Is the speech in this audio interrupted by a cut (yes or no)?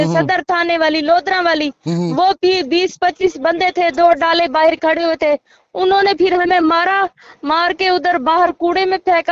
no